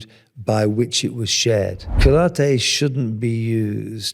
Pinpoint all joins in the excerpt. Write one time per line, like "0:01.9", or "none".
0:01.9